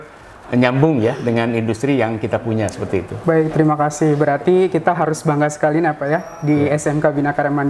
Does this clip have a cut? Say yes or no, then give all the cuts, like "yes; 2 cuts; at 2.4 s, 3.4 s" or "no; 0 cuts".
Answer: no; 0 cuts